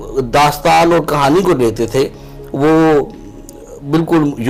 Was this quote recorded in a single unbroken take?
yes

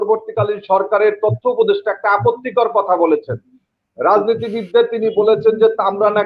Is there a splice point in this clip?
no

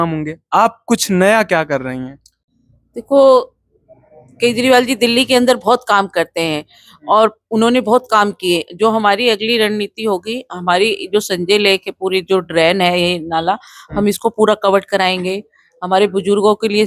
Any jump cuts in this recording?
no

